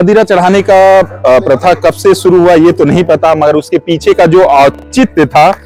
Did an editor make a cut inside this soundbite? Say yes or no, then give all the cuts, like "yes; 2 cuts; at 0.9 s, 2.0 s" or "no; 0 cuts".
no; 0 cuts